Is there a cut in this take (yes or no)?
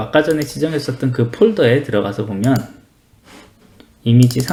no